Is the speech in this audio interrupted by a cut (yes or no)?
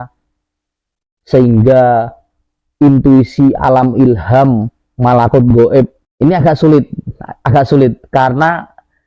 yes